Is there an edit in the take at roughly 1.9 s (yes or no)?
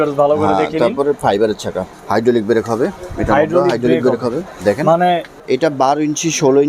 yes